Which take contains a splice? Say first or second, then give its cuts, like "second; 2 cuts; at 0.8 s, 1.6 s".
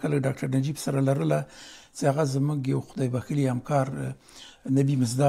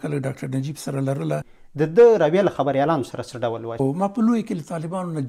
second; 2 cuts; at 1.6 s, 3.7 s